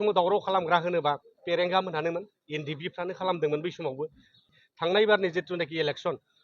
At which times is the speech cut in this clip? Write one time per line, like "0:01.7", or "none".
0:04.4